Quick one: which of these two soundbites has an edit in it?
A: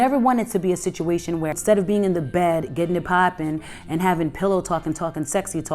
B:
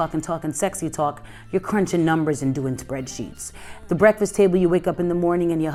A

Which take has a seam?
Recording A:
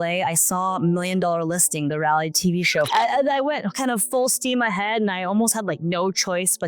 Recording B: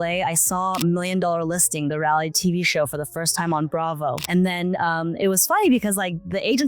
A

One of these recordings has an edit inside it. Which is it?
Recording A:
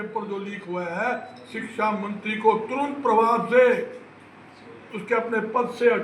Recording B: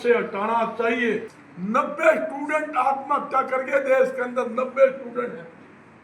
B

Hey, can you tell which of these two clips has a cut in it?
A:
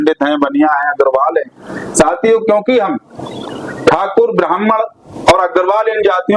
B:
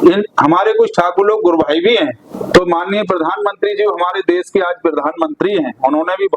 B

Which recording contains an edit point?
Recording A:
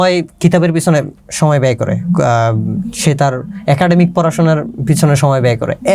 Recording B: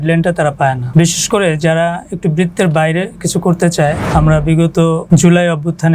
B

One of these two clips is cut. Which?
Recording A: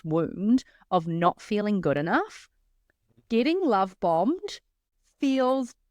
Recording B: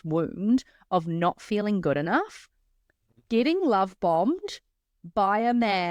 A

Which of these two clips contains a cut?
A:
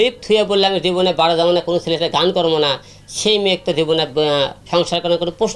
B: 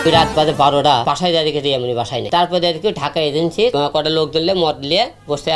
B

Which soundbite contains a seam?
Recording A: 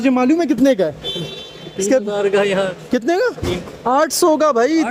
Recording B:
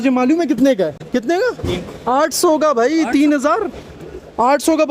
B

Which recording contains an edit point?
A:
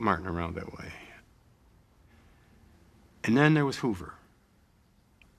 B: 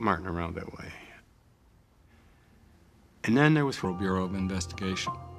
A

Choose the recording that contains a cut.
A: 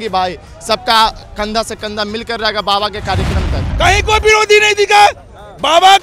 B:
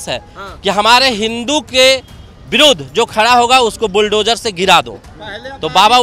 A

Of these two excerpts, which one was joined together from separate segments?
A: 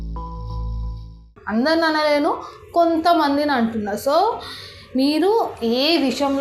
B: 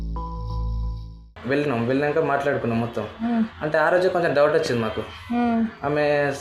B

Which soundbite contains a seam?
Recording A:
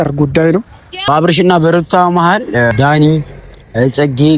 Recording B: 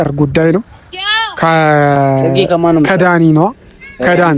A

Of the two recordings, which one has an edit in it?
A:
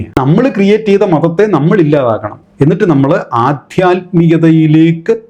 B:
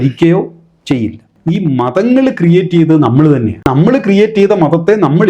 B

